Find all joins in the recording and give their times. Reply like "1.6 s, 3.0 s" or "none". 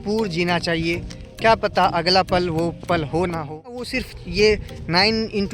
3.9 s

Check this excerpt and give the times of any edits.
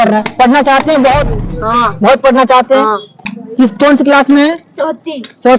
3.2 s

